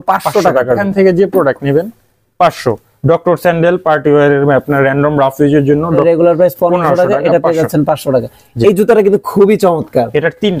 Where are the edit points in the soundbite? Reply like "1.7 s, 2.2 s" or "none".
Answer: 0.8 s, 6.0 s